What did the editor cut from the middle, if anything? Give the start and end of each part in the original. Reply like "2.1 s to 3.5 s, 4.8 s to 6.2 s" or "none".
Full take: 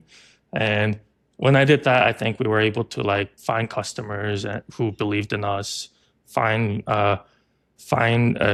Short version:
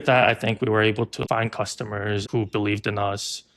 2.9 s to 3.3 s, 4.4 s to 4.7 s